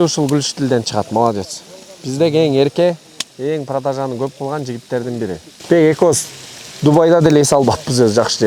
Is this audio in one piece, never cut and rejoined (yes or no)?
no